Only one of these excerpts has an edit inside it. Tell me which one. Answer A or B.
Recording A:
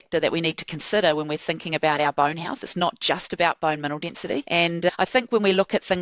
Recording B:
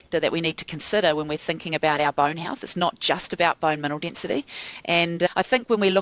A